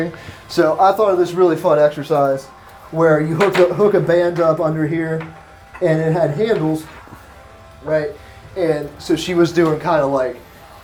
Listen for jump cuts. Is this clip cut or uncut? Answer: uncut